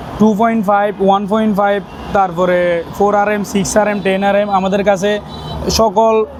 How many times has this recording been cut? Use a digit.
0